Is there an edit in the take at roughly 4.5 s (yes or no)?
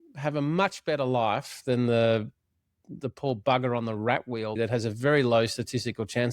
yes